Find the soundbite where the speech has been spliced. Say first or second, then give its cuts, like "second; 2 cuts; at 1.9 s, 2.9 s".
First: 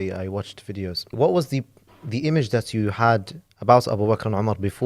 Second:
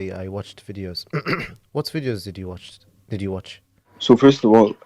first; 1 cut; at 1.1 s